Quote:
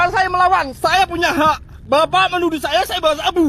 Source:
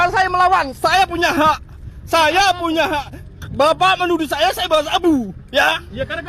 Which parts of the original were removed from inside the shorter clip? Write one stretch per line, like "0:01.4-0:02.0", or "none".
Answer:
0:01.7-0:03.4